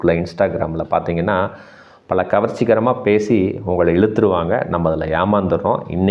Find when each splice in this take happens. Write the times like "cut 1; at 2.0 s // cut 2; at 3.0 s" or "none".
none